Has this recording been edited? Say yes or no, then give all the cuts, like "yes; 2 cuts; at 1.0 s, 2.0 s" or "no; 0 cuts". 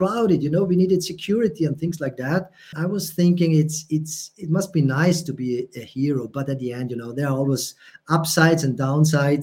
yes; 1 cut; at 2.8 s